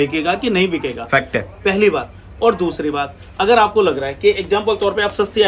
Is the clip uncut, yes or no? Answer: yes